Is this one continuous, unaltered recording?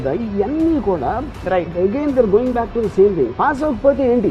yes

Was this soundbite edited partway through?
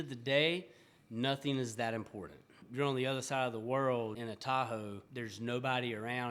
yes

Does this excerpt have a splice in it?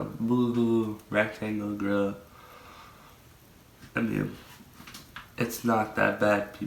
no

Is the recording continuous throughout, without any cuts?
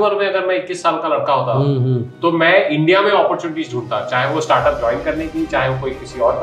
yes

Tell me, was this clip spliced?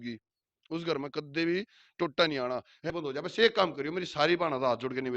yes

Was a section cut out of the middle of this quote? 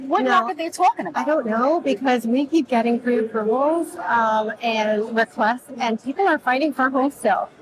no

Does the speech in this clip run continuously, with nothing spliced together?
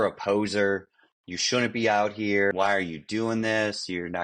no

